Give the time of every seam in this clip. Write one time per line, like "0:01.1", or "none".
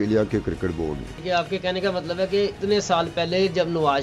0:01.1
0:02.6